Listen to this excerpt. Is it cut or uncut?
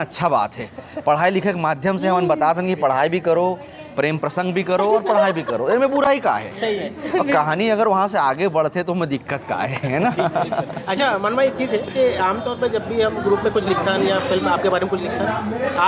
uncut